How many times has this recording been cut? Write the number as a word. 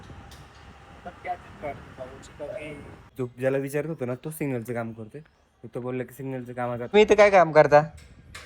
two